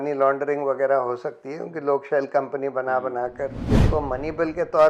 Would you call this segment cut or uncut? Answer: cut